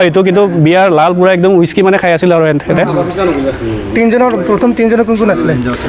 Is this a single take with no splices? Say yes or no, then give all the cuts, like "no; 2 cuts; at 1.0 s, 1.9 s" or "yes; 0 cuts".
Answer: yes; 0 cuts